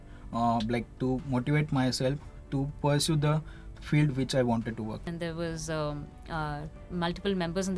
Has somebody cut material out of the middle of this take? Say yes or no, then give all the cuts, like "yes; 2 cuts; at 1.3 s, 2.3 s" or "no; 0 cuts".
yes; 1 cut; at 5.0 s